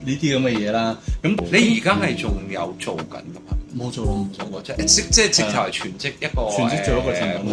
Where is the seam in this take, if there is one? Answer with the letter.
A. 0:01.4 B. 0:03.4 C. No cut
A